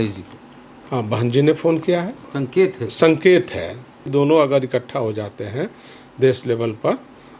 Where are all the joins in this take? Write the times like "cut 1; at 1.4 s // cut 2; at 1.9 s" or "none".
cut 1; at 2.3 s // cut 2; at 4.0 s